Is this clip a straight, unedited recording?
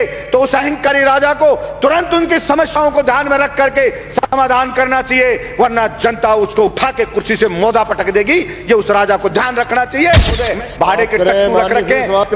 no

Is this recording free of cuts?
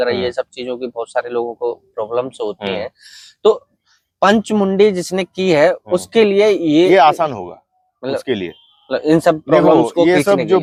yes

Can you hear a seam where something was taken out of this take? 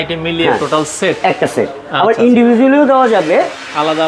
no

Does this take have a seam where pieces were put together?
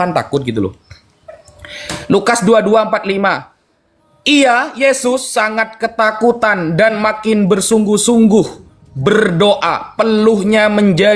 no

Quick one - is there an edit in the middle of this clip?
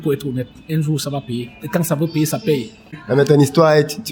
yes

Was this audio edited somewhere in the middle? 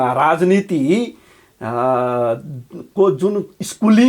no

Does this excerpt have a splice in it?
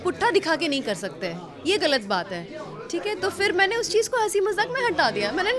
no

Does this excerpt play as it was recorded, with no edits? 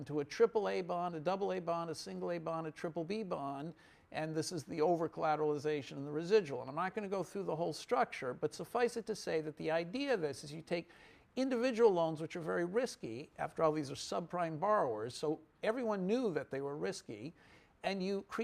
no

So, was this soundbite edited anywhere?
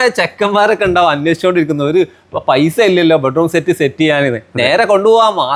no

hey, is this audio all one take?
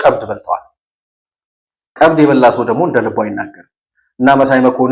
yes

